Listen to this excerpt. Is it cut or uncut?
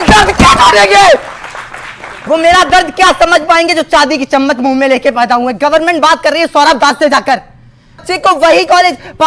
cut